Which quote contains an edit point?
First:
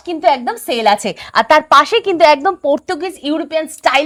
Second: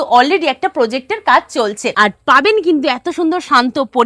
second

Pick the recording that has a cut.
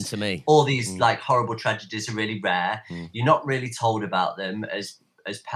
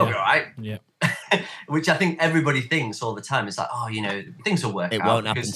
second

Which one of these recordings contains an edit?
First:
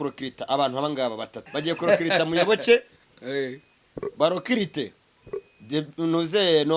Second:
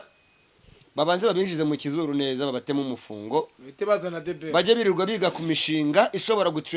first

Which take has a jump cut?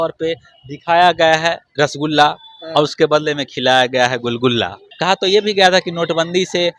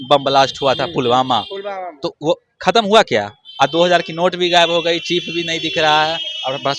first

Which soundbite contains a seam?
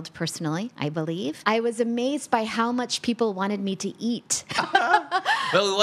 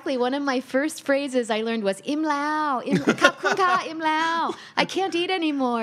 first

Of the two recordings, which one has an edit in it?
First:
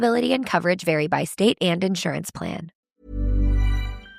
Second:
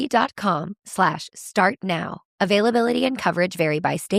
first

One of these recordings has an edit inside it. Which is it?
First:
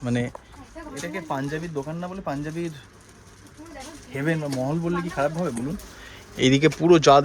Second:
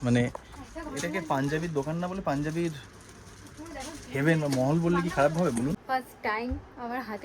second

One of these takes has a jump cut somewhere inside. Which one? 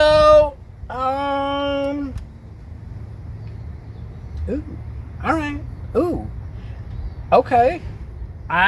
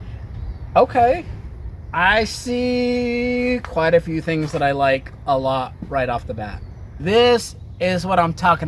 second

